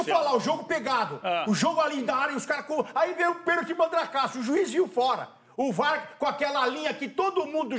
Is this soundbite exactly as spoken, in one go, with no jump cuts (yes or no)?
yes